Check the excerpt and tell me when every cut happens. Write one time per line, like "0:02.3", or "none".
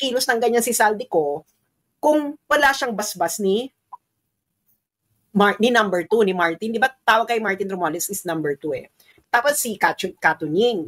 0:09.1